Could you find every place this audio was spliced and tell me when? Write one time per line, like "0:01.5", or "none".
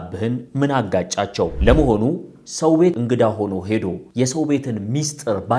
0:01.5
0:02.9
0:04.0